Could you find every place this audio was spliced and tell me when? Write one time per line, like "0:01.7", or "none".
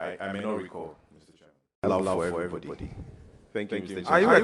0:01.8